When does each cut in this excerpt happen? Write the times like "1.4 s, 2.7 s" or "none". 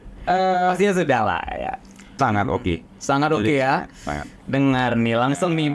2.1 s